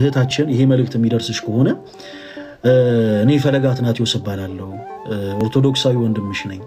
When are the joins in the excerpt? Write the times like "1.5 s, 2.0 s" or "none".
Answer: none

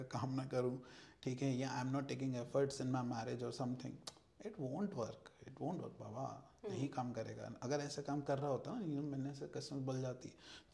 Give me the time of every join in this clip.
none

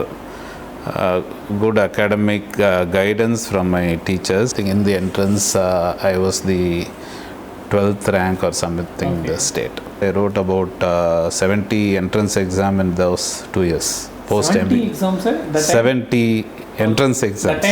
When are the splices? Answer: 4.5 s, 10.0 s

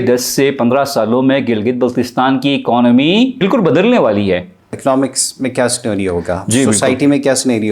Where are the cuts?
3.4 s, 4.8 s

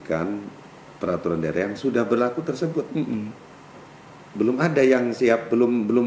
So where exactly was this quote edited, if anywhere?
none

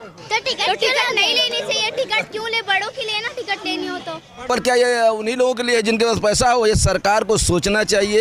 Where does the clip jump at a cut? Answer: 4.5 s

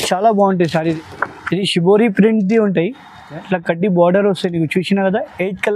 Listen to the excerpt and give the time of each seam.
1.0 s

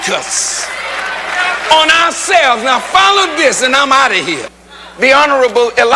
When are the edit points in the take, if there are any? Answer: 4.5 s

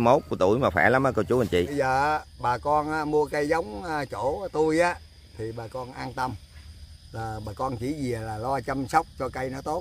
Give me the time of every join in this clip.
1.7 s

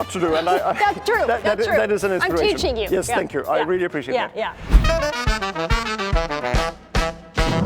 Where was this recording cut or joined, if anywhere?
4.7 s

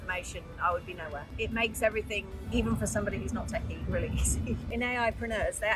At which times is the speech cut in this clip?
1.3 s, 2.4 s, 3.8 s, 4.7 s

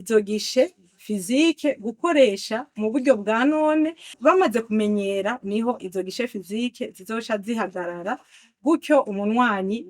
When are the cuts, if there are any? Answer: 4.2 s

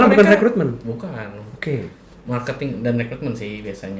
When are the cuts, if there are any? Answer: none

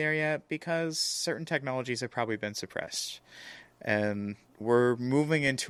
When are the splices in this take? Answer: none

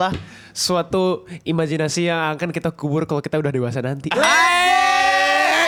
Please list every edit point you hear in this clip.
none

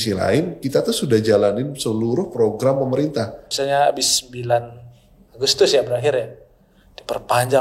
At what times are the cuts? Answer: 3.5 s

